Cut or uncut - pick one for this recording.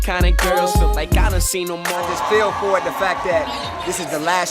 cut